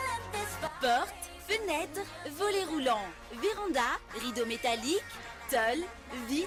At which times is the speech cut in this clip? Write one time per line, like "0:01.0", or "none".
none